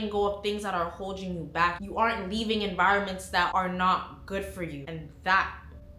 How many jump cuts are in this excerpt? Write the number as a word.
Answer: zero